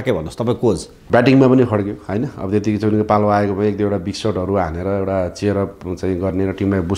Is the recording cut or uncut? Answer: cut